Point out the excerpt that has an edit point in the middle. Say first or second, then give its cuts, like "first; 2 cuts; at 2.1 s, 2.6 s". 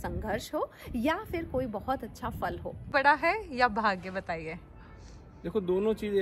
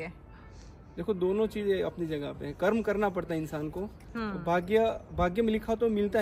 first; 1 cut; at 2.9 s